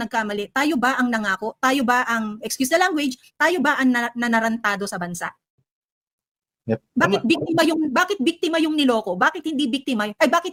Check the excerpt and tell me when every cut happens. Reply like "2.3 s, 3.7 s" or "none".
none